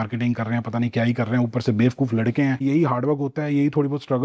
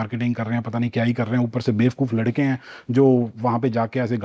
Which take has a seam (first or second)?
first